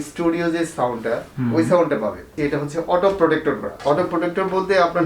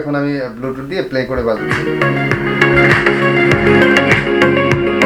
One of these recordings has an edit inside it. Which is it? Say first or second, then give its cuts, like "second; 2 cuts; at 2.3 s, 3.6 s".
first; 2 cuts; at 2.3 s, 3.7 s